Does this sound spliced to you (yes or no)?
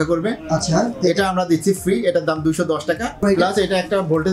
yes